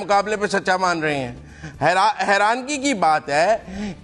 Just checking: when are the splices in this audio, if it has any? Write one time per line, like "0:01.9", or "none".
none